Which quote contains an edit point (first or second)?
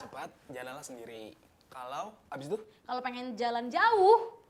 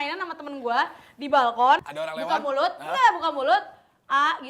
second